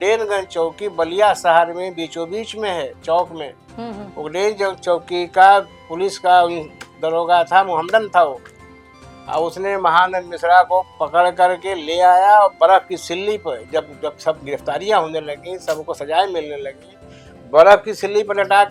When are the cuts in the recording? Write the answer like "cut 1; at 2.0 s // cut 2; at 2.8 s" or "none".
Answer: none